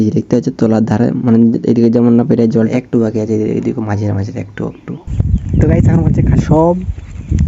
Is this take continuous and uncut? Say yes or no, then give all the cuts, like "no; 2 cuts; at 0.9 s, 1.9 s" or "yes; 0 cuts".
no; 2 cuts; at 2.7 s, 6.4 s